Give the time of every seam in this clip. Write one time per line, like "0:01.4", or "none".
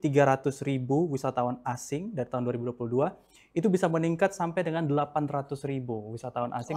none